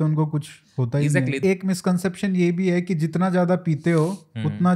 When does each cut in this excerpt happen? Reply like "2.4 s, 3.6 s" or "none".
1.4 s